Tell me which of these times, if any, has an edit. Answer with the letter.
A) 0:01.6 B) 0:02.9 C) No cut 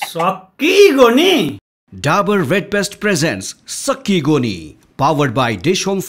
A